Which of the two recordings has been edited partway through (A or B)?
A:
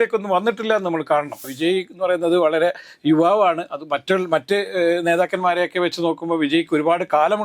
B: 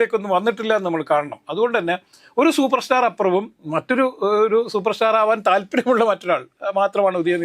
A